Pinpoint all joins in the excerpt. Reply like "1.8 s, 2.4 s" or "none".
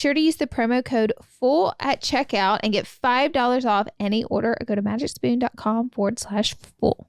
none